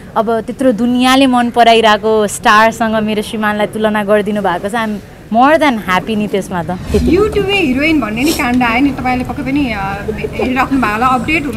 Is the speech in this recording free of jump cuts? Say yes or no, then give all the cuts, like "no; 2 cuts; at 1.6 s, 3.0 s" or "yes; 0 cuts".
no; 1 cut; at 6.8 s